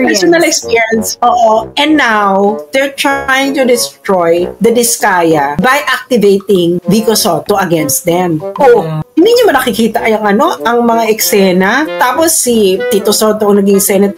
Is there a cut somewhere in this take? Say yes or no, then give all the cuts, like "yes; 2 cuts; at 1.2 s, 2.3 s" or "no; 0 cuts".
no; 0 cuts